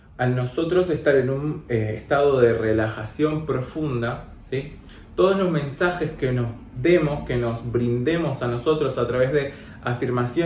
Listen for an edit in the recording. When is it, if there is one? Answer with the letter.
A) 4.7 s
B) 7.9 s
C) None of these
C